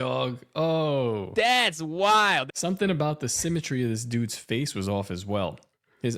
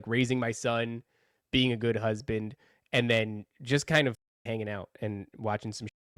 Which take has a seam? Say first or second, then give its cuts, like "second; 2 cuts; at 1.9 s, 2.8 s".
first; 1 cut; at 2.5 s